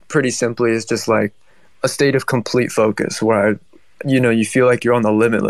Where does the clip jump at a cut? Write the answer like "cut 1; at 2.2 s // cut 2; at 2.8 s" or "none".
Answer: none